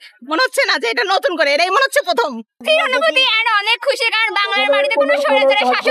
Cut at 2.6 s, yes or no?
yes